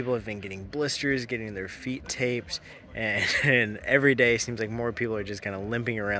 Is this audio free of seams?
no; 1 cut; at 5.3 s

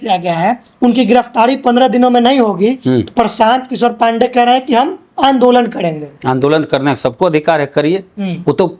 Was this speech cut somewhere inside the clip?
no; 0 cuts

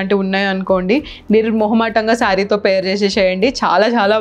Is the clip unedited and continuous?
yes; 0 cuts

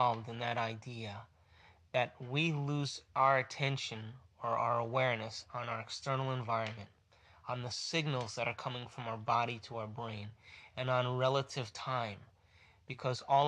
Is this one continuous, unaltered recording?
no; 1 cut; at 2.7 s

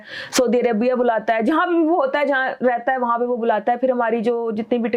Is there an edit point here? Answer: no; 0 cuts

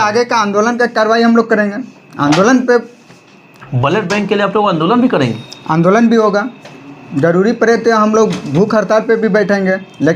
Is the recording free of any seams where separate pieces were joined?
yes; 0 cuts

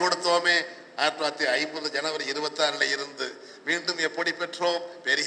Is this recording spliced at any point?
no; 0 cuts

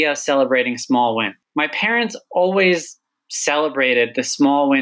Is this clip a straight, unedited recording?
no; 1 cut; at 1.4 s

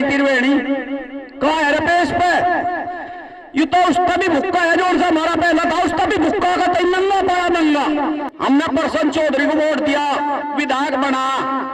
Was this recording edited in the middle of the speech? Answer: yes; 1 cut; at 8.3 s

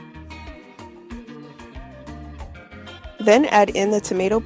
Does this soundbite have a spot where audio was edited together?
yes; 2 cuts; at 1.9 s, 2.6 s

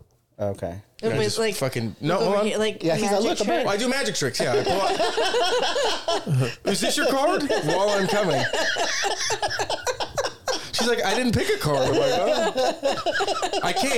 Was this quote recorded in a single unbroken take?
yes; 0 cuts

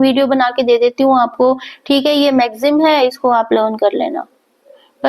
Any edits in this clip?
no; 0 cuts

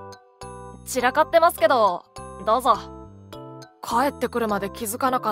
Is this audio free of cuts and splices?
no; 1 cut; at 0.9 s

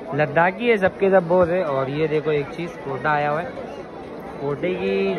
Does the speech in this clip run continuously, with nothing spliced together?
yes; 0 cuts

